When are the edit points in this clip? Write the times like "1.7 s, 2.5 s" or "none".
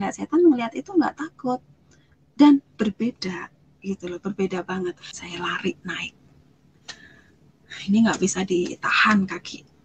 5.1 s